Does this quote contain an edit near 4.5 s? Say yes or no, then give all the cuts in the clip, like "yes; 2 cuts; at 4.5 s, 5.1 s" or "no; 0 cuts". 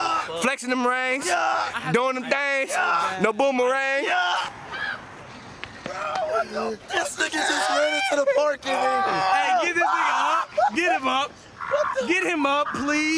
yes; 1 cut; at 4.5 s